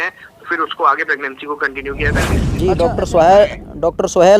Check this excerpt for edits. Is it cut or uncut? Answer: cut